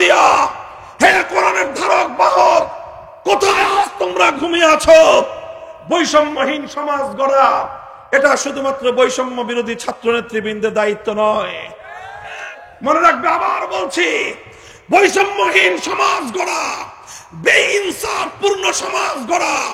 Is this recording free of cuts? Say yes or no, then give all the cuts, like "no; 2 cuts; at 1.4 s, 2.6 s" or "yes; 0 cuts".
yes; 0 cuts